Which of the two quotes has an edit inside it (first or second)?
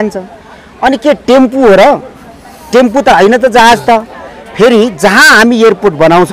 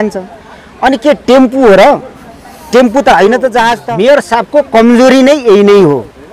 second